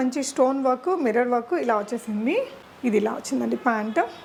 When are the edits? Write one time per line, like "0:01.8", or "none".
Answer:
none